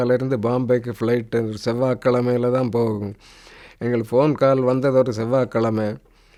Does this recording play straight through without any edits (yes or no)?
yes